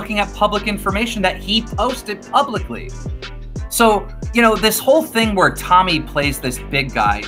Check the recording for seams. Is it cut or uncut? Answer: uncut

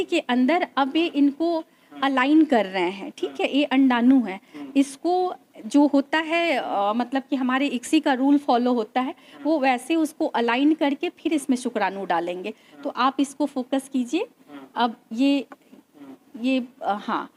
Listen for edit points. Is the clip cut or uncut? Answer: uncut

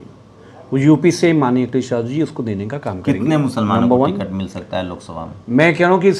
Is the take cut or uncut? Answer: uncut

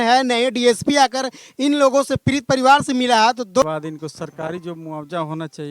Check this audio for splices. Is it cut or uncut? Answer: cut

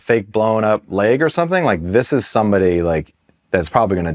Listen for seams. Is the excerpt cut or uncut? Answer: uncut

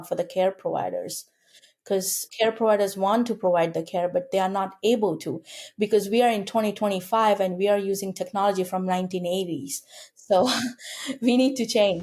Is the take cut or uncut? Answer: uncut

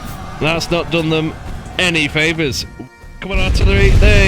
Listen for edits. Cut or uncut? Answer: cut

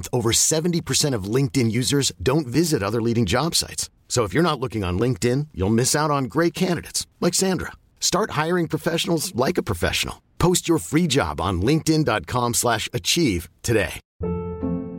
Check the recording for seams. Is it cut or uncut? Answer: cut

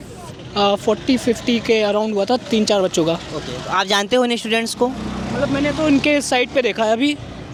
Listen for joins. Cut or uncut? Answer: uncut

